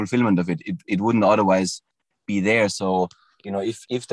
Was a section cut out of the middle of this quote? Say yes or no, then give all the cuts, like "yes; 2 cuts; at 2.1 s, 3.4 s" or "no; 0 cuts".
no; 0 cuts